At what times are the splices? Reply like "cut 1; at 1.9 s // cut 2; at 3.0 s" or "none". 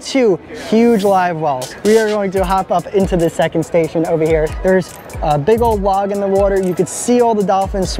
cut 1; at 1.7 s // cut 2; at 4.5 s